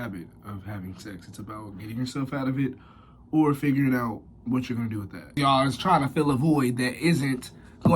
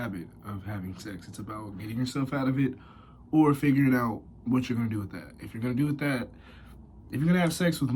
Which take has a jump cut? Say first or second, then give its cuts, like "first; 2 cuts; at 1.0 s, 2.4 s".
first; 1 cut; at 5.3 s